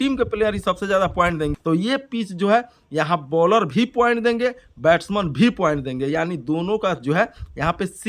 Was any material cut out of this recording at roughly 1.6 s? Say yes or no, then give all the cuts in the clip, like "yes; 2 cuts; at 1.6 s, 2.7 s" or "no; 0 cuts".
yes; 1 cut; at 1.6 s